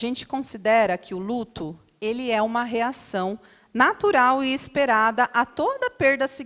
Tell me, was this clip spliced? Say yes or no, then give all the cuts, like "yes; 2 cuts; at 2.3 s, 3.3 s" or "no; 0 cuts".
no; 0 cuts